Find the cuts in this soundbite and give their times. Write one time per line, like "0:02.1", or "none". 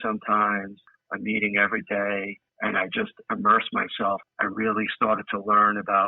none